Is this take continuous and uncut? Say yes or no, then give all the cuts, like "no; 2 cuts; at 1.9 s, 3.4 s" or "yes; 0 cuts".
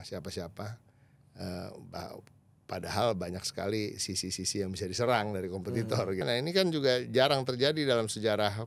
no; 1 cut; at 6.2 s